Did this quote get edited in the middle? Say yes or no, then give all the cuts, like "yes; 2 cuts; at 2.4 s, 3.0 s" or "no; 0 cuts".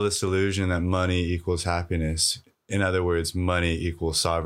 no; 0 cuts